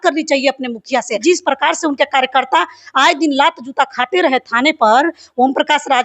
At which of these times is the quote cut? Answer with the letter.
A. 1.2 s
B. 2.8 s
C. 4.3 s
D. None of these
A